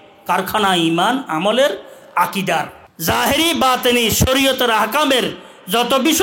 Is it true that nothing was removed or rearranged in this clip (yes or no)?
no